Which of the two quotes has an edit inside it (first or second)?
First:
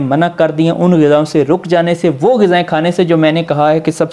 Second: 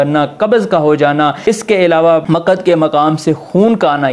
second